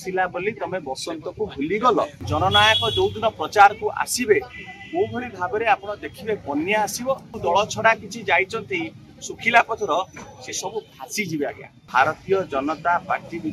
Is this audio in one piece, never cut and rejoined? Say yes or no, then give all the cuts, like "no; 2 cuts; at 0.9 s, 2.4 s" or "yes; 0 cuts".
no; 3 cuts; at 2.2 s, 7.3 s, 11.8 s